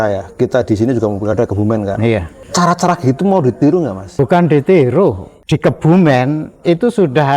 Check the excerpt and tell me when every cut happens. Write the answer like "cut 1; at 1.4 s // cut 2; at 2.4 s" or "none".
cut 1; at 2.4 s // cut 2; at 4.1 s // cut 3; at 5.3 s